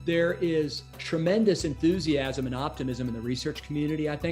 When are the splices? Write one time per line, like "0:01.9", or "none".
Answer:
0:00.9